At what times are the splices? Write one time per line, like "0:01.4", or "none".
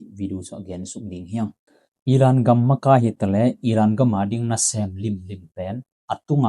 0:02.1